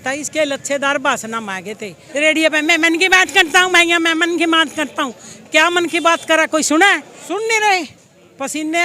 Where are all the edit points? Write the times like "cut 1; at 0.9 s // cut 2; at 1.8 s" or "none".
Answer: cut 1; at 1.9 s // cut 2; at 7.1 s